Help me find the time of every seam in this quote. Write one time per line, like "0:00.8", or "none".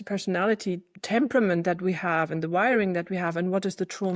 0:00.9